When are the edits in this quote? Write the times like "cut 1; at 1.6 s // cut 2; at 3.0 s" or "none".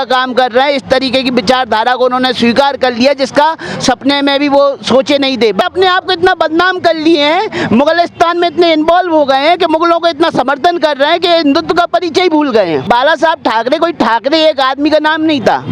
cut 1; at 5.6 s // cut 2; at 12.8 s